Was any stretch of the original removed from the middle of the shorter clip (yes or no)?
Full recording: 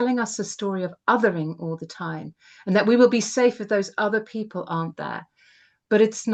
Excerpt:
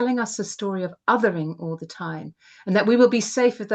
no